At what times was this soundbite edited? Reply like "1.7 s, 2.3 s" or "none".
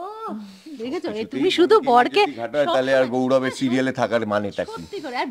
none